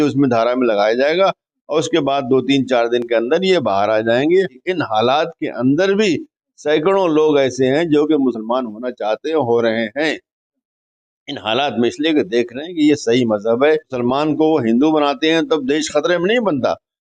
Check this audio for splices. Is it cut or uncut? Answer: cut